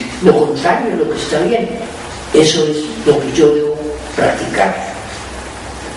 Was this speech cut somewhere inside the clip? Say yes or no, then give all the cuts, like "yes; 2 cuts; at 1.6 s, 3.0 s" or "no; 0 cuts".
no; 0 cuts